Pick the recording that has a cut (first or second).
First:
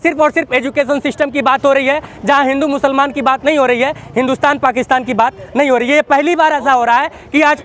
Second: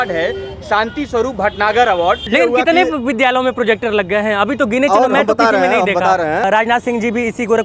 second